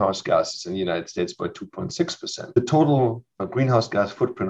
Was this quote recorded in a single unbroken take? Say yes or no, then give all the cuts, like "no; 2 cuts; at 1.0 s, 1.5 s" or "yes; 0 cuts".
no; 2 cuts; at 2.5 s, 3.5 s